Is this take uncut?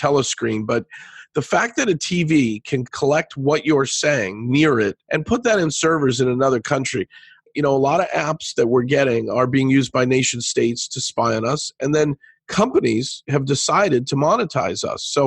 no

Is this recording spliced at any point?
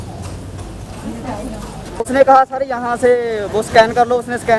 yes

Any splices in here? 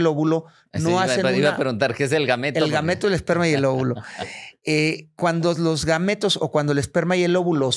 no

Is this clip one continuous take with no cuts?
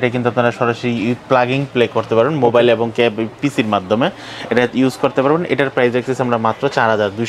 yes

